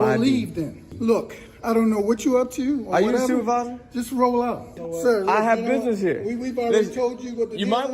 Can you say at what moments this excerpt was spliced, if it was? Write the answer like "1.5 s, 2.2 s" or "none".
0.9 s, 4.8 s